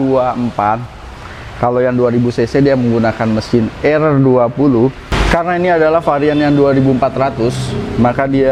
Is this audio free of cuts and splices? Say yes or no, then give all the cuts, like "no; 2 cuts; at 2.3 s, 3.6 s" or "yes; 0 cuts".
yes; 0 cuts